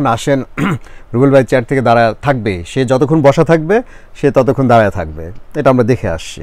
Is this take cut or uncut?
uncut